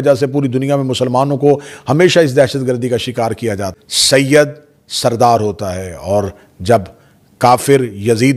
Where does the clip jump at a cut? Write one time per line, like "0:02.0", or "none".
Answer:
0:03.8